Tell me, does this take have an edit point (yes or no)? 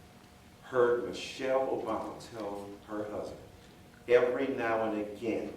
no